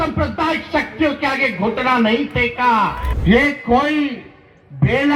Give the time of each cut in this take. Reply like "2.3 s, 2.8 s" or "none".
3.1 s